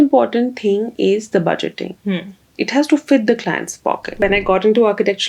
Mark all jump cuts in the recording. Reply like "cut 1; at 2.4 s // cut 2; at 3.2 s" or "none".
cut 1; at 4.2 s